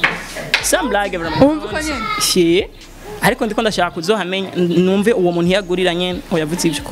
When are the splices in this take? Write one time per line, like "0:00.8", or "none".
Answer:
none

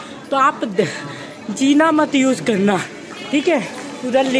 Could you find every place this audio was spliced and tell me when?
none

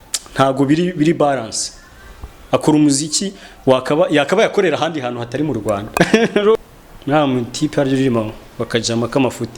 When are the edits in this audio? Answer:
0:06.6

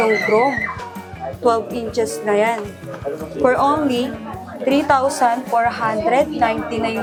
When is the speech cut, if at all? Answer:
none

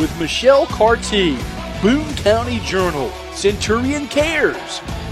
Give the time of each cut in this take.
none

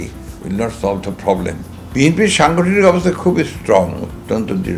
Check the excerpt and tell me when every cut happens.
0:01.9

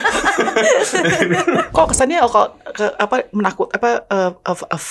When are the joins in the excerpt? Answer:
0:01.7

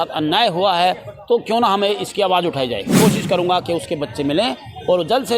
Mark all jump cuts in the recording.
0:02.9

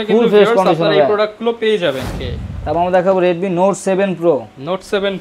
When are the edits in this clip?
0:02.1

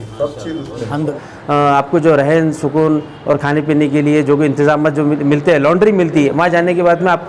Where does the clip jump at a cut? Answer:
0:01.1

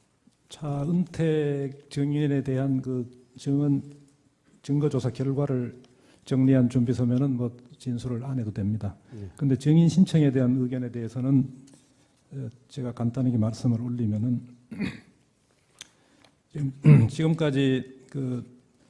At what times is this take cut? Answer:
none

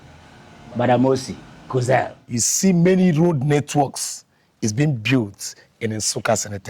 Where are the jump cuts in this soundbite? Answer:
0:02.1

